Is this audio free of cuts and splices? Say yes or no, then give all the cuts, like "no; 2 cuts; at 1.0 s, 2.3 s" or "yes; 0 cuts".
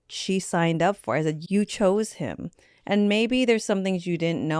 no; 1 cut; at 1.4 s